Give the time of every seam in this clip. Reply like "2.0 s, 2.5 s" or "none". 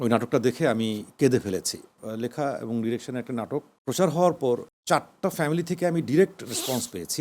2.0 s, 3.7 s, 4.7 s